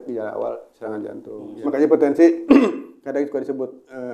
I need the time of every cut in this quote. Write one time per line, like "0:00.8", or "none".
0:01.7